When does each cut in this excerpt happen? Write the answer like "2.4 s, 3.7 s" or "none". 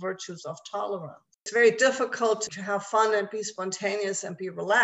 1.5 s, 2.5 s